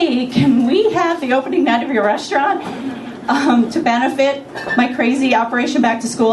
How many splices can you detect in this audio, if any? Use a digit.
1